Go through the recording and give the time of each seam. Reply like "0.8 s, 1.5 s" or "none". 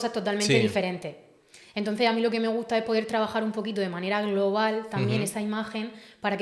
none